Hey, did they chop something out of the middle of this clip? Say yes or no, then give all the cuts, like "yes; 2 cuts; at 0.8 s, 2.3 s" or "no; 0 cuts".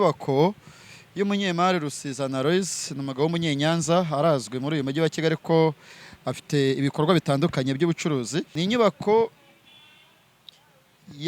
yes; 1 cut; at 8.5 s